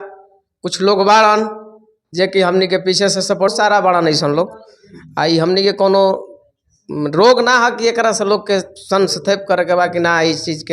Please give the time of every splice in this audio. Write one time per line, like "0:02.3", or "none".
0:03.5